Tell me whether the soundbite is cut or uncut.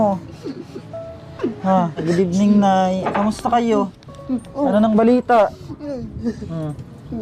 cut